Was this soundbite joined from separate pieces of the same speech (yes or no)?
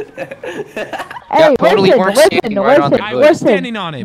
yes